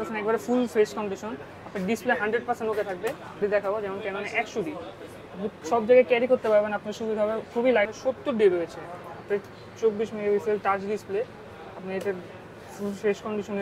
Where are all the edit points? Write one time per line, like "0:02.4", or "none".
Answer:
0:03.4
0:07.9